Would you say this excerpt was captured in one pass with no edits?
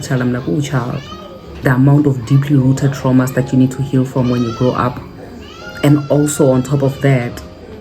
no; 1 cut; at 1.6 s

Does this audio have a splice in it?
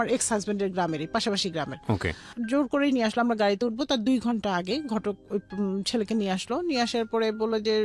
no; 0 cuts

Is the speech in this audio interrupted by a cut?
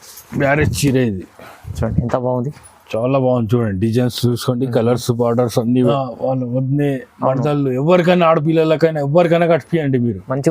yes; 1 cut; at 5.9 s

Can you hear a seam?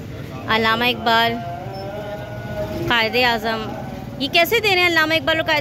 no; 0 cuts

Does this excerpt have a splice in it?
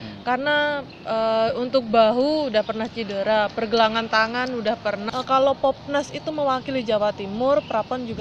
yes; 1 cut; at 5.0 s

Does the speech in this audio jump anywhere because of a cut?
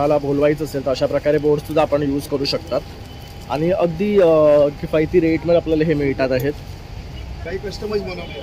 yes; 1 cut; at 7.4 s

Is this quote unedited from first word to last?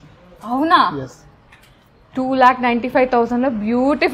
yes; 0 cuts

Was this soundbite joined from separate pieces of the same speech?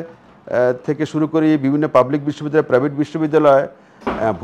no; 0 cuts

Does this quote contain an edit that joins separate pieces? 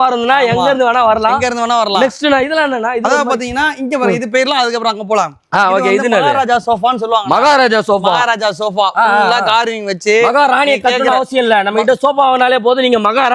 no; 0 cuts

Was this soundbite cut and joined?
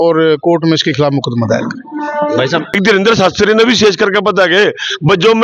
yes; 1 cut; at 2.7 s

